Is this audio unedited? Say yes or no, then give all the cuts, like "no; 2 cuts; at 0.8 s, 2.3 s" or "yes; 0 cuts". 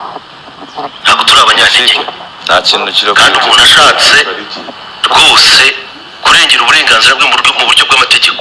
yes; 0 cuts